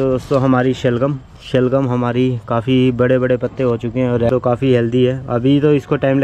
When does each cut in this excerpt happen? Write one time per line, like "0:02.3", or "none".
0:04.3